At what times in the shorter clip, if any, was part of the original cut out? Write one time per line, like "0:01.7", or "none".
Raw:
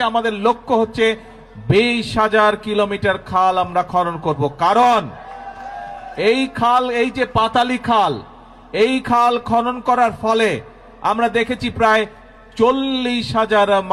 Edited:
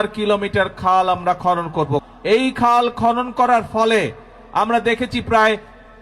0:02.0